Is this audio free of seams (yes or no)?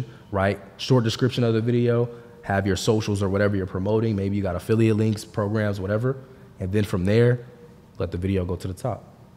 yes